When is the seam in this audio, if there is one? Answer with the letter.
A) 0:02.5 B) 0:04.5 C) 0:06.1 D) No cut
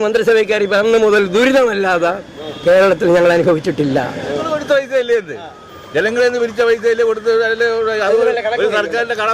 B